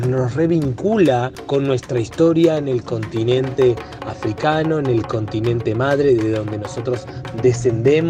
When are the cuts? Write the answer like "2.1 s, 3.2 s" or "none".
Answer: none